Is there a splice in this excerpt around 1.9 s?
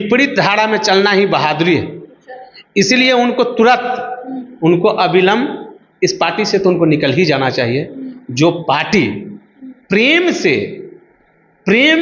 no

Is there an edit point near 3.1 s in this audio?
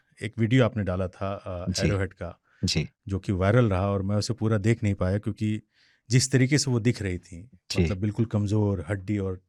no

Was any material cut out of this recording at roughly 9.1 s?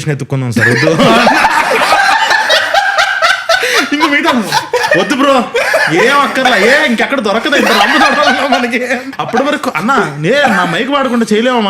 yes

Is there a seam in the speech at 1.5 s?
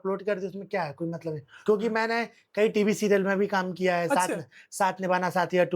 yes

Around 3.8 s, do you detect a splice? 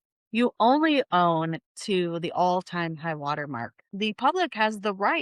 yes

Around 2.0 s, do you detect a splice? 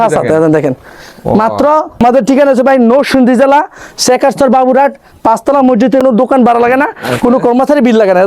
yes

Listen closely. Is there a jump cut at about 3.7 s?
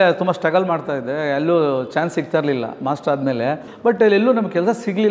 yes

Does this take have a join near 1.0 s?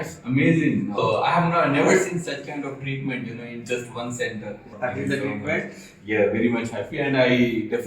yes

